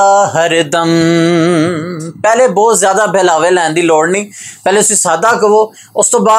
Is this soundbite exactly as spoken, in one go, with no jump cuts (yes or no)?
yes